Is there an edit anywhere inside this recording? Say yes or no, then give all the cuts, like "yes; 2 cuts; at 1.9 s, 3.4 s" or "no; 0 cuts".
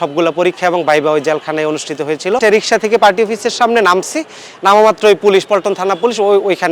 yes; 1 cut; at 2.4 s